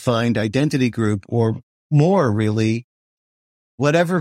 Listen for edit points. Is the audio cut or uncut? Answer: uncut